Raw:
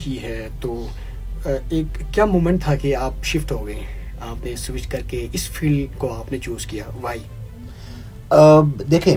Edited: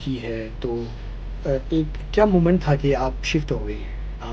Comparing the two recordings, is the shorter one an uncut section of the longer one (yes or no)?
yes